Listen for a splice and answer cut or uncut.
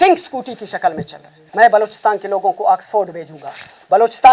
cut